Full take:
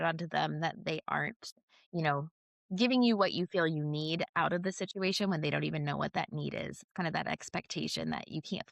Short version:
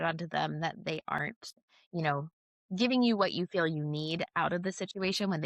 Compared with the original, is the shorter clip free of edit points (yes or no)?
yes